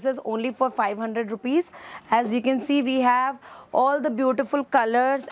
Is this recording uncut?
yes; 0 cuts

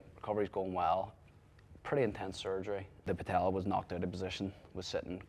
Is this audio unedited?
no; 1 cut; at 3.0 s

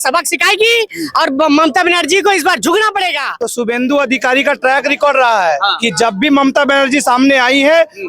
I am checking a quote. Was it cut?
yes; 1 cut; at 3.3 s

